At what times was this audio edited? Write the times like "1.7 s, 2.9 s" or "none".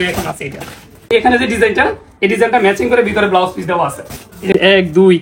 1.1 s, 4.5 s